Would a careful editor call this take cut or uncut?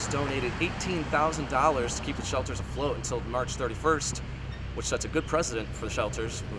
uncut